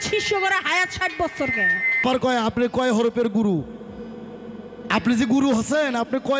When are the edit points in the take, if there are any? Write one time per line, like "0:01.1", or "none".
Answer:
0:02.0